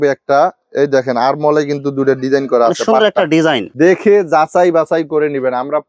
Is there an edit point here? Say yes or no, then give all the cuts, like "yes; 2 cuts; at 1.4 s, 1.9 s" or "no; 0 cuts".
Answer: yes; 1 cut; at 3.7 s